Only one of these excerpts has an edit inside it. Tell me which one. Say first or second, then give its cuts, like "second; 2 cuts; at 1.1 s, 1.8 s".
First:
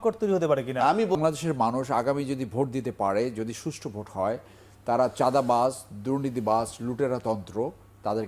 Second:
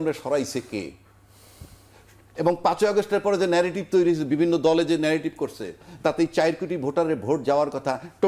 first; 1 cut; at 1.1 s